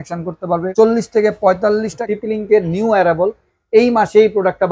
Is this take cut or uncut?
cut